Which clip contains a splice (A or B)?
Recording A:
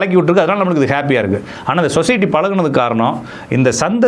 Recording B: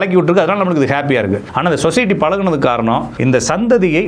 B